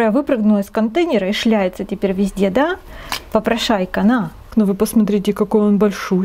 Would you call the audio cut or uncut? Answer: cut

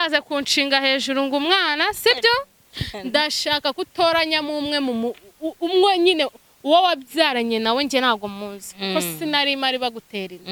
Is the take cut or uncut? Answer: uncut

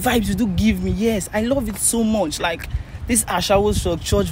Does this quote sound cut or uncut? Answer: uncut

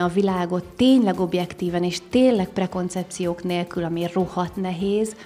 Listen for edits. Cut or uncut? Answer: uncut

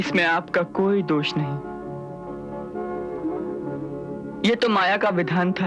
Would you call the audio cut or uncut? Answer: uncut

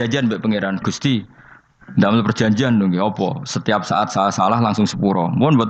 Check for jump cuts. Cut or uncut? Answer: uncut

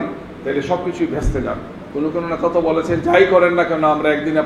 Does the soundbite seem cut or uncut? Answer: cut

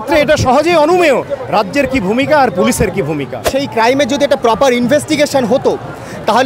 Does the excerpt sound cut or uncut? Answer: cut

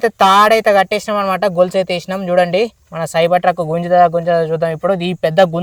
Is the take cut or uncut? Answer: uncut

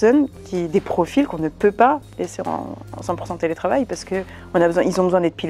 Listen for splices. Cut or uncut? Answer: uncut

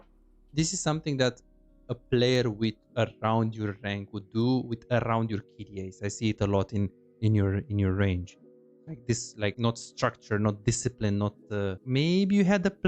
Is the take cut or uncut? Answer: cut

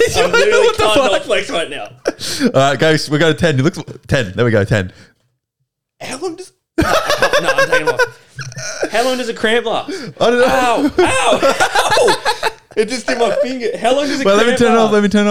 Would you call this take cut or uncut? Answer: uncut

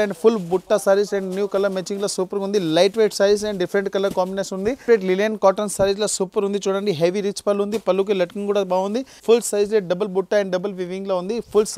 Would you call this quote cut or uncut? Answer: cut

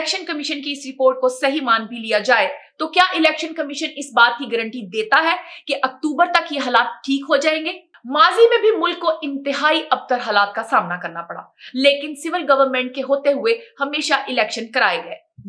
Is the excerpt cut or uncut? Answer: uncut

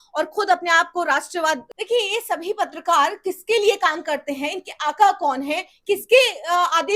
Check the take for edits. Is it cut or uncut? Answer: cut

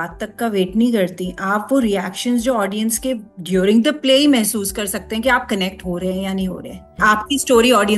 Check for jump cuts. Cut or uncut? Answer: cut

